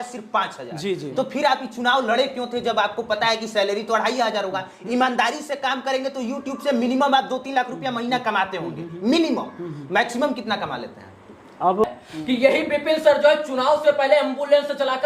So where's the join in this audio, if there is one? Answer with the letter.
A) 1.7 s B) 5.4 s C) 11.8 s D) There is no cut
C